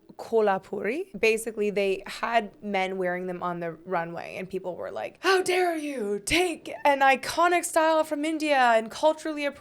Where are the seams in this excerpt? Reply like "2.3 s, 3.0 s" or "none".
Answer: 1.1 s